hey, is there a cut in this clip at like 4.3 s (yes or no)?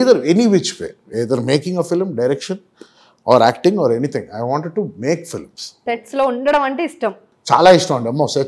no